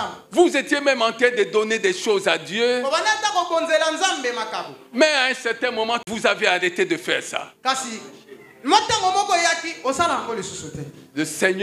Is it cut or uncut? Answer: cut